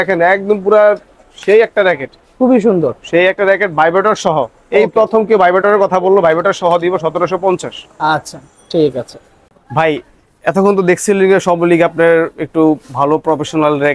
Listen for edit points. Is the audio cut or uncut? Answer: uncut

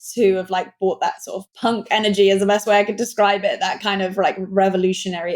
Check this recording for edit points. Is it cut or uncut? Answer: cut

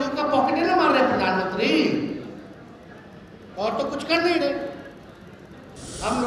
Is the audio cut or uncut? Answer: uncut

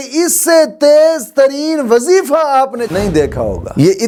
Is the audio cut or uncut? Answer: uncut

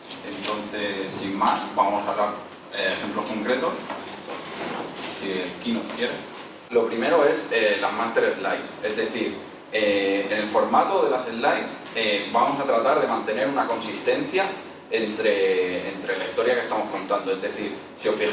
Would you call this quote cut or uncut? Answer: uncut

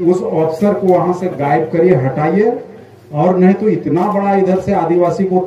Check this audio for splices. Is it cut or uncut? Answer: uncut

